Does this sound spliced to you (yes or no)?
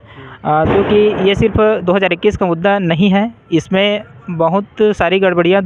no